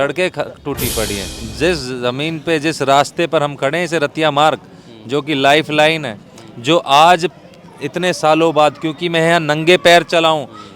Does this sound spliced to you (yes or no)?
yes